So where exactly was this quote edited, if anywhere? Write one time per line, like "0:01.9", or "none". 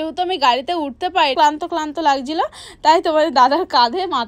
0:01.3